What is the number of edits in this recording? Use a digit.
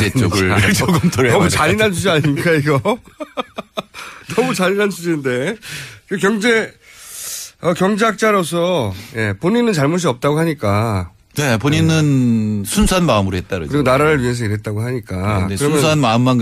0